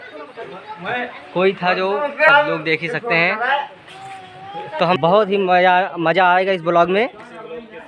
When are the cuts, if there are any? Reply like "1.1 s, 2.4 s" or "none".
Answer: 2.3 s, 5.0 s